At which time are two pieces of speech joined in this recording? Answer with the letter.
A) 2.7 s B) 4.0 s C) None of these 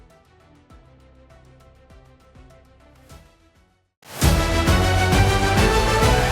B